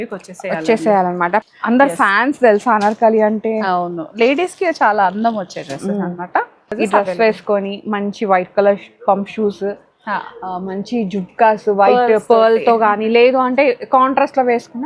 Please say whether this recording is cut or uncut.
cut